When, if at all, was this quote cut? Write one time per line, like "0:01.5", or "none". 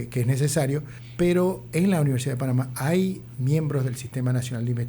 0:01.0